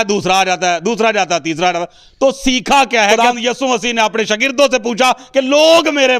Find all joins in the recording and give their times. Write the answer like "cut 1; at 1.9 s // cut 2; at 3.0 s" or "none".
cut 1; at 3.1 s